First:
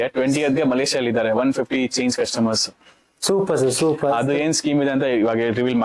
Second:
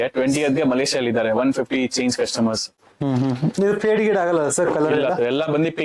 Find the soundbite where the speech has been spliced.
second; 1 cut; at 2.3 s

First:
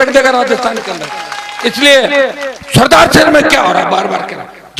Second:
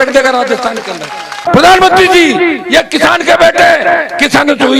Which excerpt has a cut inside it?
second; 1 cut; at 1.4 s

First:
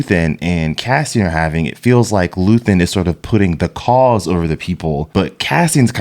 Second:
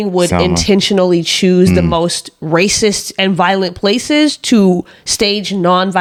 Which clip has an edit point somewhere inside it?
first; 1 cut; at 5.0 s

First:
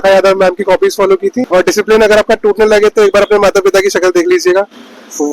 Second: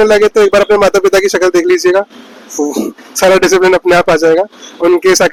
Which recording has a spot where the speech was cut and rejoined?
first; 1 cut; at 1.5 s

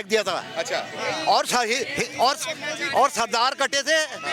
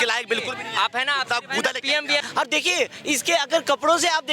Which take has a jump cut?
second; 1 cut; at 2.3 s

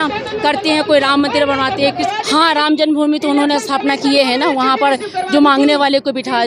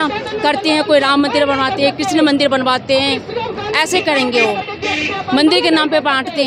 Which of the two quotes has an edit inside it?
first; 1 cut; at 2.0 s

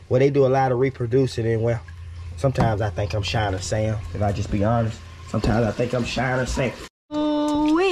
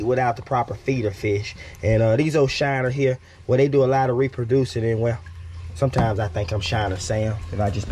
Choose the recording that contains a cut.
first; 1 cut; at 6.8 s

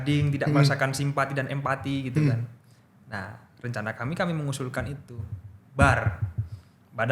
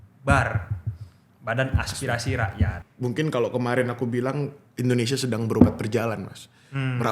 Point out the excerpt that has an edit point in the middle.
second; 1 cut; at 2.9 s

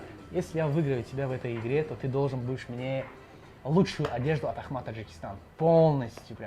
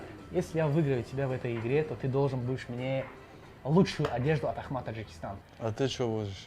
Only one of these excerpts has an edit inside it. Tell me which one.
second; 1 cut; at 5.4 s

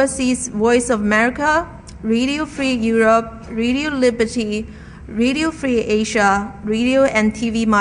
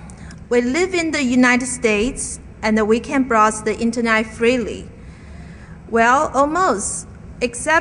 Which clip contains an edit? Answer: first; 1 cut; at 4.3 s

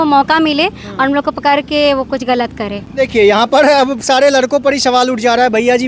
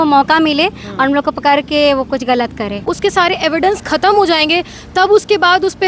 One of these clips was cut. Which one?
second; 1 cut; at 2.8 s

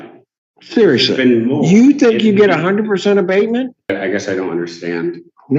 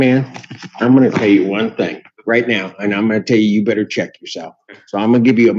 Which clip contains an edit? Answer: first; 1 cut; at 3.9 s

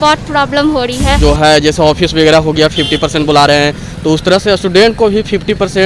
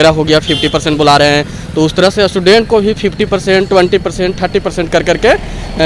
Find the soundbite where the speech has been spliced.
first; 1 cut; at 1.2 s

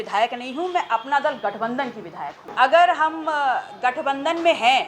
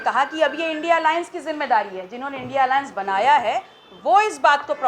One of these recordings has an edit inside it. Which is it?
first; 1 cut; at 2.4 s

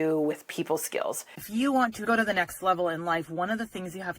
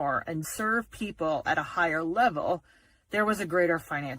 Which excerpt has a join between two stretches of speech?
first; 1 cut; at 1.3 s

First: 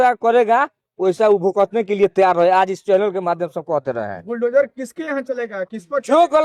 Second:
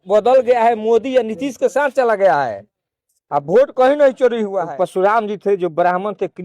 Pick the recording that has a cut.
second; 1 cut; at 4.6 s

